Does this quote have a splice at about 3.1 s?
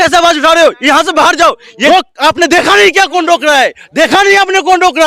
no; 1 cut; at 1.9 s

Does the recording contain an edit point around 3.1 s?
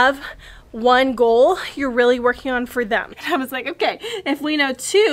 yes; 1 cut; at 3.1 s

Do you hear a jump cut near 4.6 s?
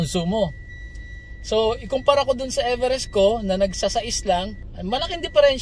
yes; 1 cut; at 4.6 s

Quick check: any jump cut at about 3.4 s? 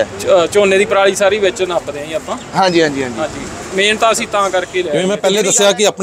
no; 1 cut; at 4.9 s

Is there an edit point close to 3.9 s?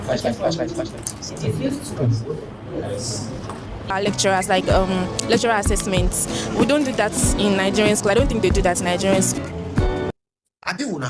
yes; 2 cuts; at 3.9 s, 10.1 s

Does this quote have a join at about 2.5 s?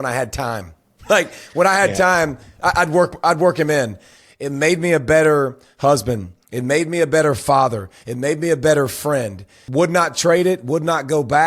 no; 2 cuts; at 4.1 s, 9.6 s

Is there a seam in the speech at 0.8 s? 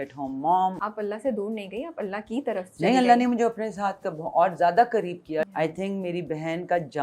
yes; 2 cuts; at 0.8 s, 5.5 s

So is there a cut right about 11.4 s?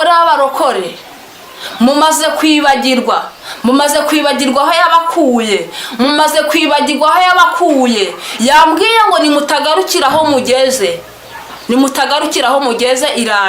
no; 0 cuts

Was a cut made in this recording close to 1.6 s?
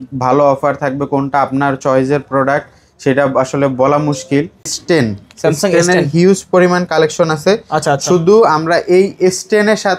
no; 1 cut; at 4.8 s

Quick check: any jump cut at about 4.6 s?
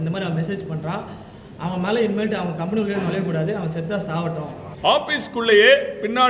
yes; 1 cut; at 4.6 s

